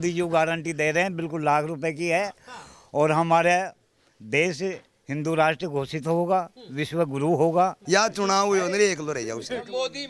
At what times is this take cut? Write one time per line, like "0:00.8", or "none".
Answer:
0:07.8

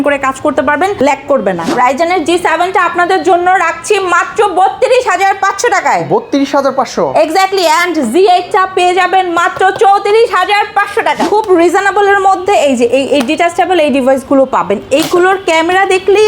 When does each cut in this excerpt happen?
0:01.7
0:11.2

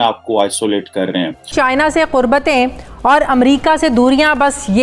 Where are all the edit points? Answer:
0:01.5

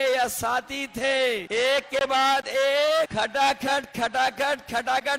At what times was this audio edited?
0:01.4
0:03.1

